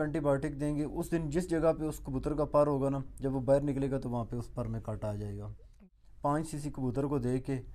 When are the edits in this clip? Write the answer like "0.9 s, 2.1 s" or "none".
5.7 s